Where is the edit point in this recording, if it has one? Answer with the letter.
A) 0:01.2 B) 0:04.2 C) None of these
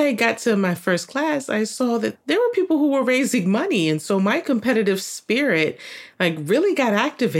C